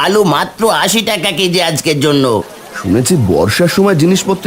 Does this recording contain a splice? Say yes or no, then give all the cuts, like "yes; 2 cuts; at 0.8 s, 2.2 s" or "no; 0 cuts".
yes; 1 cut; at 2.6 s